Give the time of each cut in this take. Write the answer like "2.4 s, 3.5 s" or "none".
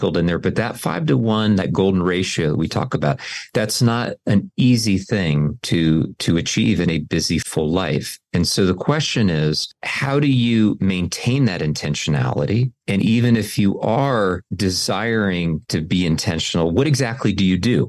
none